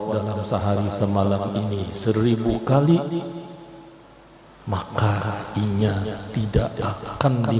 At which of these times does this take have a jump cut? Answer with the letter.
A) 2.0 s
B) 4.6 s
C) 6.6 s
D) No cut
D